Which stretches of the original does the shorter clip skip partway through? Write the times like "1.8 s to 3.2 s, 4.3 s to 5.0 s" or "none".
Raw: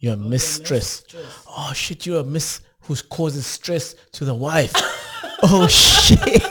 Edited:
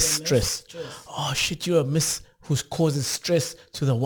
none

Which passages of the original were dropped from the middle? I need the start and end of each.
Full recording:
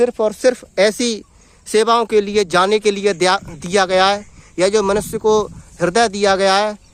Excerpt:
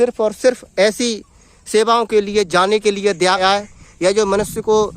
3.4 s to 4.0 s

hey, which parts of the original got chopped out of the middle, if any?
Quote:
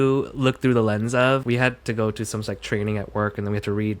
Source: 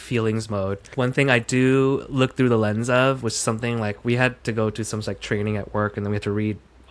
3.2 s to 4.0 s

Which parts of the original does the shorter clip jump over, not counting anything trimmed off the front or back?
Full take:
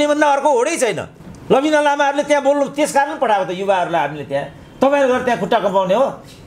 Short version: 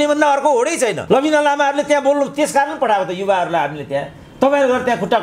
1.0 s to 1.4 s

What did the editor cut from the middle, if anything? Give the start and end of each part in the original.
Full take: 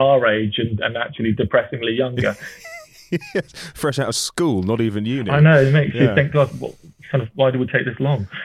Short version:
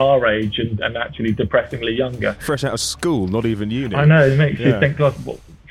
2.4 s to 3.7 s

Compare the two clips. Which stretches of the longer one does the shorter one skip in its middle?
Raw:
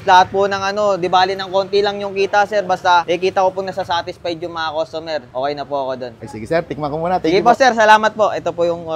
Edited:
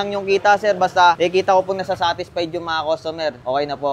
none

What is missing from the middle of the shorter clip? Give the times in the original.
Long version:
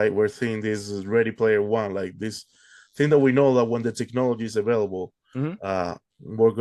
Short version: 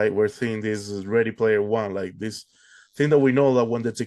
none

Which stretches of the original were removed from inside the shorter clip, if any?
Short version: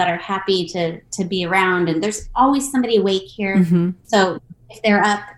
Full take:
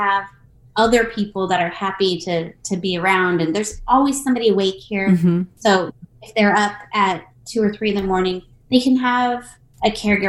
none

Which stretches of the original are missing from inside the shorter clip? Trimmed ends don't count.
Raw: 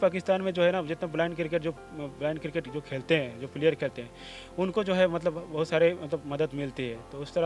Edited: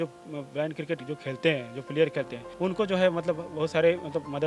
4.1 s to 4.4 s

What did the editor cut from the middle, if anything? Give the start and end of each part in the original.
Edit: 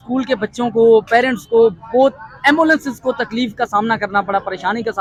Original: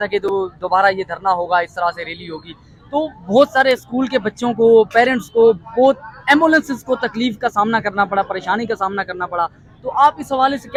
none

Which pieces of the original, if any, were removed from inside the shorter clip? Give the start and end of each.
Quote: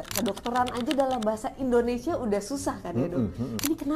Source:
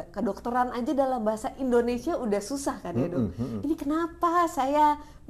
none

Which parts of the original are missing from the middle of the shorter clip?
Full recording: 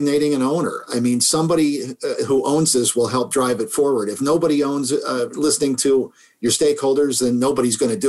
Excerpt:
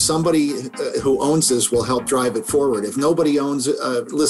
none

